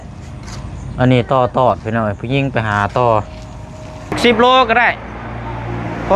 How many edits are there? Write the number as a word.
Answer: one